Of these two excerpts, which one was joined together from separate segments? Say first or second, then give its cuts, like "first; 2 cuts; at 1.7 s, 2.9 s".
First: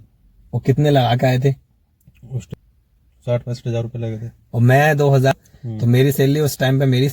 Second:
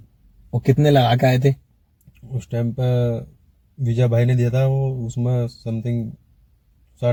first; 2 cuts; at 2.4 s, 5.3 s